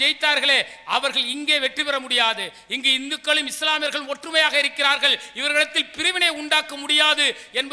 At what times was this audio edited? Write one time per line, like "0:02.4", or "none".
none